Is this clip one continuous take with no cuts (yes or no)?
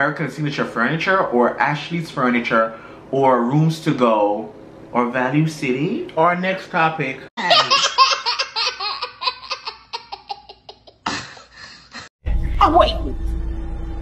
yes